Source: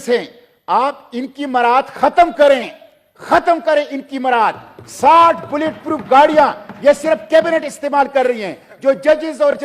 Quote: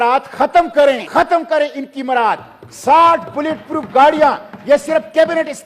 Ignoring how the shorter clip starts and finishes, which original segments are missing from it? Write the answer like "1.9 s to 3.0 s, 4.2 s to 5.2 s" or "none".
2.7 s to 3.2 s